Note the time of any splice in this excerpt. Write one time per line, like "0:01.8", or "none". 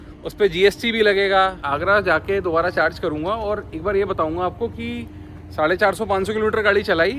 0:01.7

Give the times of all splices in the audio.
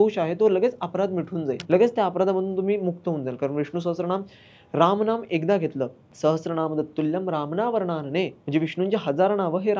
0:01.6
0:06.0
0:08.4

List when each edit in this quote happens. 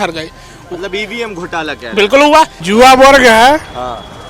0:02.6

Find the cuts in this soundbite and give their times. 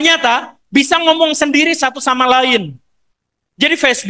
none

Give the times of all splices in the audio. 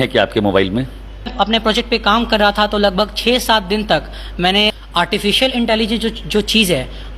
0:01.3
0:04.8

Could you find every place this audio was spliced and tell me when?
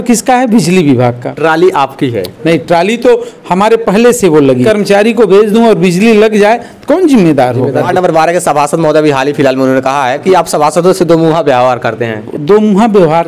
0:01.3
0:04.6
0:07.9
0:10.2
0:12.2

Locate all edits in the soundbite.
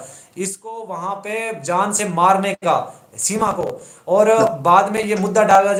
none

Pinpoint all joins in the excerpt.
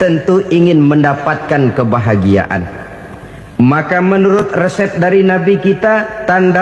none

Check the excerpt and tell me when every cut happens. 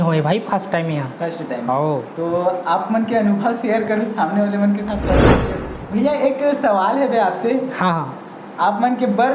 0:05.3

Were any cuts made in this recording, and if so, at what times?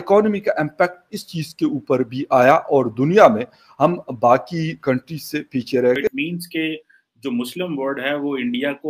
0:06.1

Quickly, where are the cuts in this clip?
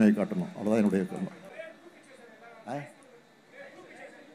0:01.5

